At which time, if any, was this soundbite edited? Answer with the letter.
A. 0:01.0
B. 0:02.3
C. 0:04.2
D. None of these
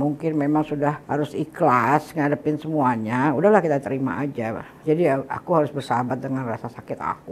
A